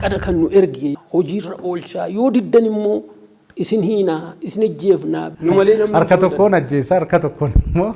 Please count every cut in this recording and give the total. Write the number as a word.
two